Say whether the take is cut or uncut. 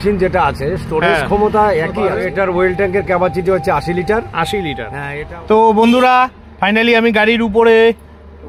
cut